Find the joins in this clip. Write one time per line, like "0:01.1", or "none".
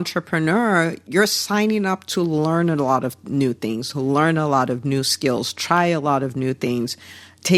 0:01.0